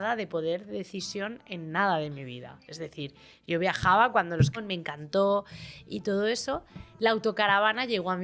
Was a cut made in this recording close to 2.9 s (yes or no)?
no